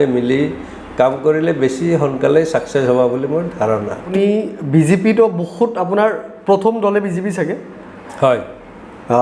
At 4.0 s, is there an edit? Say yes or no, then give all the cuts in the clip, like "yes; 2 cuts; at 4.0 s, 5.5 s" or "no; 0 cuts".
yes; 1 cut; at 4.0 s